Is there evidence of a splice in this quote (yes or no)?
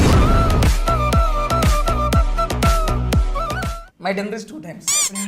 yes